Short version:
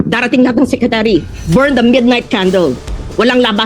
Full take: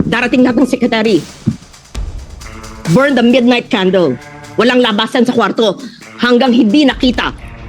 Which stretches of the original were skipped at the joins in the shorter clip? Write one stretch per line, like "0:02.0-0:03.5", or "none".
0:01.3-0:02.7